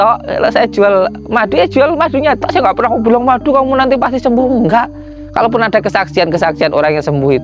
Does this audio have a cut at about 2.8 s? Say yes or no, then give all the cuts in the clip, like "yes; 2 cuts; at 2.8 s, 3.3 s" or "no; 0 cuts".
no; 0 cuts